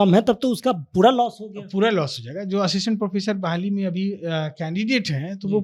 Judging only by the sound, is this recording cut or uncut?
uncut